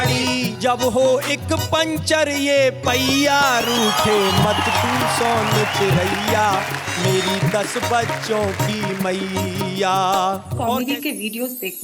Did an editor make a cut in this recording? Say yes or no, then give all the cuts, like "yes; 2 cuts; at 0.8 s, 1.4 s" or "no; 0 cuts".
yes; 1 cut; at 10.6 s